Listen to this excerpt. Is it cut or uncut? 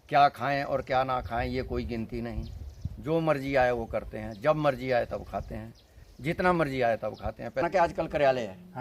cut